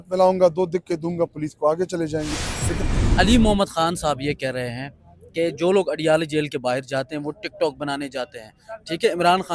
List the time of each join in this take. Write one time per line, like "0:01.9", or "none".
0:02.8